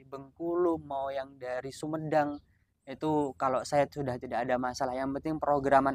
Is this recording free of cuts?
yes; 0 cuts

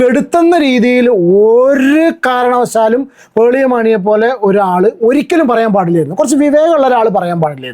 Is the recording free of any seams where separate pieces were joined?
yes; 0 cuts

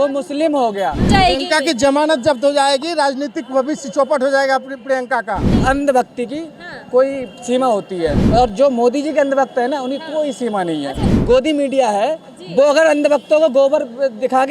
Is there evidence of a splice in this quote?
yes; 3 cuts; at 1.1 s, 5.5 s, 11.0 s

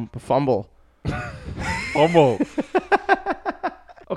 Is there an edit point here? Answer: no; 0 cuts

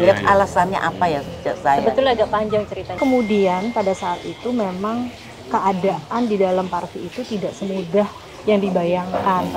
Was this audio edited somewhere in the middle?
yes; 1 cut; at 3.0 s

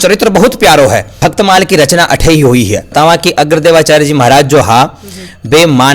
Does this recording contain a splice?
yes; 2 cuts; at 1.1 s, 2.9 s

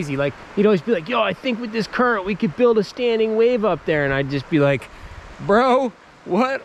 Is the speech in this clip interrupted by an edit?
no; 0 cuts

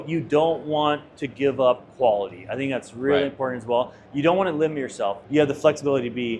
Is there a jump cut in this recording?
no; 0 cuts

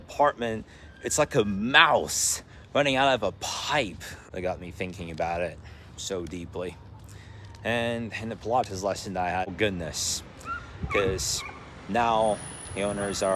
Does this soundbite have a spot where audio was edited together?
yes; 2 cuts; at 4.1 s, 9.5 s

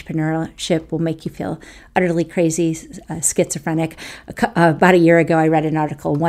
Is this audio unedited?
yes; 0 cuts

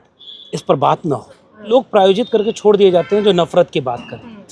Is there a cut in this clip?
yes; 1 cut; at 1.7 s

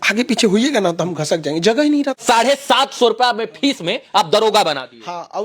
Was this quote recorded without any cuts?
no; 1 cut; at 2.2 s

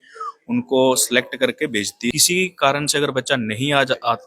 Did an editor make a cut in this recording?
yes; 1 cut; at 2.1 s

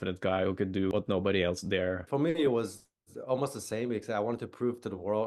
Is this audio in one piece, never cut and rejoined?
no; 2 cuts; at 0.9 s, 2.0 s

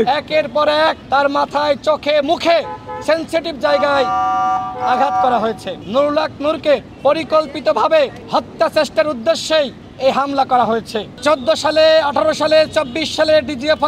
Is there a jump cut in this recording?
yes; 2 cuts; at 5.8 s, 11.0 s

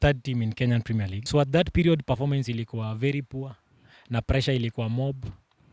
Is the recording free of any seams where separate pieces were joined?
no; 1 cut; at 1.2 s

